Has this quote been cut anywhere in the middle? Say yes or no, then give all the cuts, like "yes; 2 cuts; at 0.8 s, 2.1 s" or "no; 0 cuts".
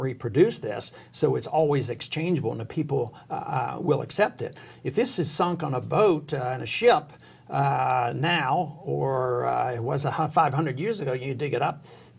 no; 0 cuts